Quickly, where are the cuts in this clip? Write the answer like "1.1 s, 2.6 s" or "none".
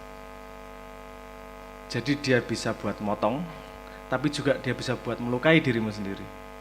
none